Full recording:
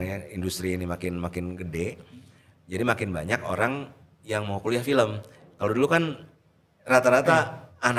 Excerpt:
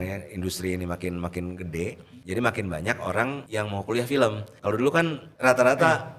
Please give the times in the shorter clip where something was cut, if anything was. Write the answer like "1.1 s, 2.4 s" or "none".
2.1 s, 3.4 s, 4.7 s